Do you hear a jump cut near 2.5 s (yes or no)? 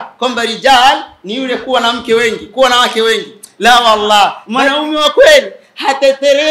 no